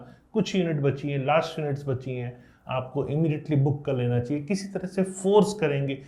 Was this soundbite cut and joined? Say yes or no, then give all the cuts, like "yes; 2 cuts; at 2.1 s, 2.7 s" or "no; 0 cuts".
no; 0 cuts